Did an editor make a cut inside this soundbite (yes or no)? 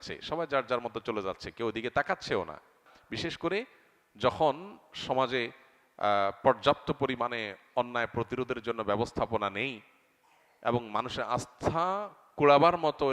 yes